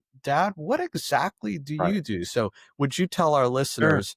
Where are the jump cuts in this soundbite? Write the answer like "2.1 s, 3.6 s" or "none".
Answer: none

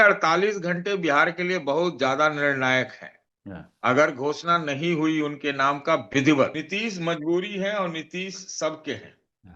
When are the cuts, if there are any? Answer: 6.6 s

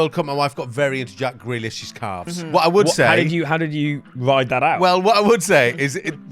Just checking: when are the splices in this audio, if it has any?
2.3 s

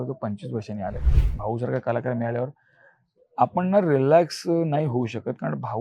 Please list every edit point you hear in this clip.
1.0 s

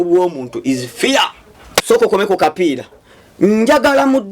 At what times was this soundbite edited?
1.7 s

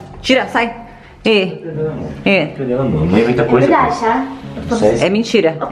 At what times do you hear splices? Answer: none

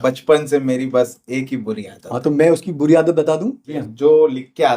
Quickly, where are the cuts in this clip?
3.7 s

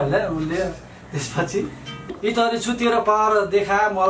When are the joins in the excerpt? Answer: 2.2 s

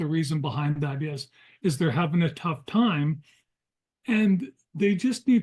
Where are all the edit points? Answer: none

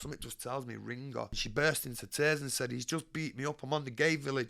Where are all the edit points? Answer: 1.4 s

